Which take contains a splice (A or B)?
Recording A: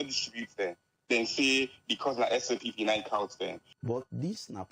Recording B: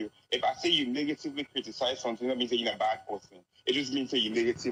A